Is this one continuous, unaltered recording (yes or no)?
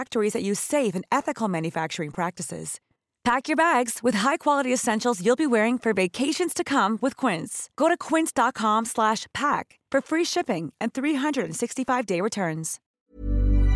no